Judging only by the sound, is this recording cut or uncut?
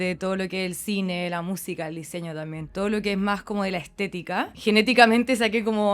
cut